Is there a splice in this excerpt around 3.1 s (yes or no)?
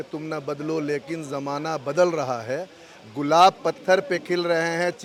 no